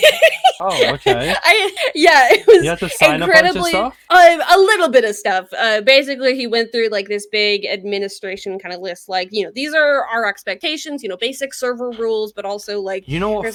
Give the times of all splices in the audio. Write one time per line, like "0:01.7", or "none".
none